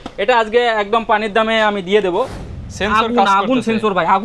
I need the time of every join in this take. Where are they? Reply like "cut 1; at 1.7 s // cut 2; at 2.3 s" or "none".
cut 1; at 2.4 s